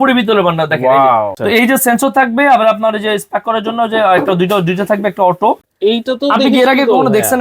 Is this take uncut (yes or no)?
no